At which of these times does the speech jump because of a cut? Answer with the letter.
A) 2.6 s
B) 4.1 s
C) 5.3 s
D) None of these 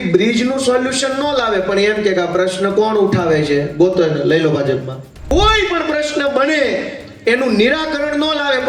C